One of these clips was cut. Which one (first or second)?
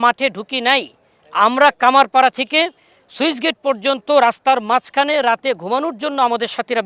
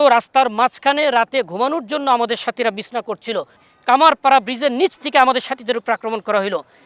second